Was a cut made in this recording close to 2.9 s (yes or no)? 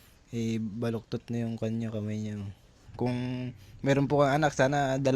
yes